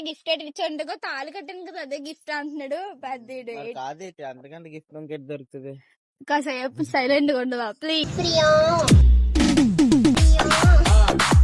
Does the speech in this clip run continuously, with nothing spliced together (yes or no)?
yes